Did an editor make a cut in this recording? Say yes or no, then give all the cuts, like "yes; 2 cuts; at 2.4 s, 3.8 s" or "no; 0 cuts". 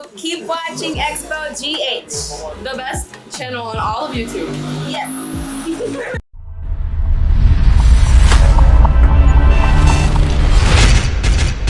no; 0 cuts